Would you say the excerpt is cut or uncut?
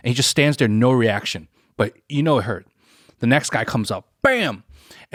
uncut